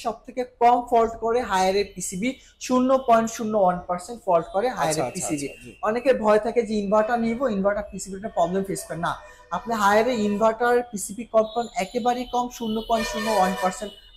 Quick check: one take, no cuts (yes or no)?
yes